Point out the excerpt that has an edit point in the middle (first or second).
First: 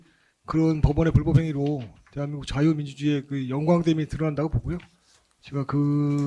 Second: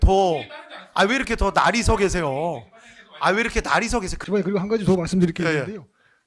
second